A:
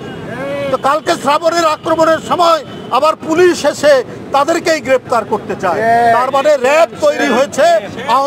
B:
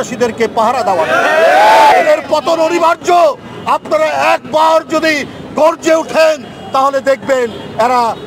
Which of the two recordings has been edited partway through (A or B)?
B